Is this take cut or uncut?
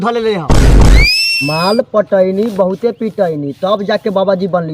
cut